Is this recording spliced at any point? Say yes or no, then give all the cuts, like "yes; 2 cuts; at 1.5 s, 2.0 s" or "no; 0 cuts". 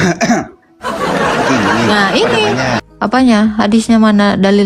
yes; 1 cut; at 2.9 s